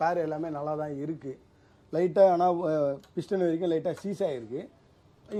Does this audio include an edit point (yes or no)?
no